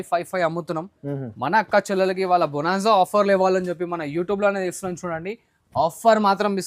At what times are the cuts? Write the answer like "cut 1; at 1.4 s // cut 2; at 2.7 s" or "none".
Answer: none